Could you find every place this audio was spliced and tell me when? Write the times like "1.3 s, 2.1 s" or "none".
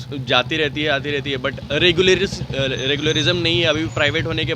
none